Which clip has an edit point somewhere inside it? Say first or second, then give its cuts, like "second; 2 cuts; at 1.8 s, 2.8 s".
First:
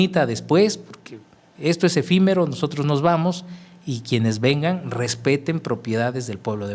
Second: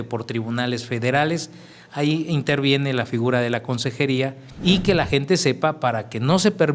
second; 1 cut; at 4.4 s